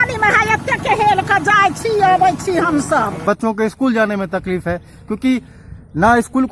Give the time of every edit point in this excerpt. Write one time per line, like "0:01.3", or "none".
0:03.2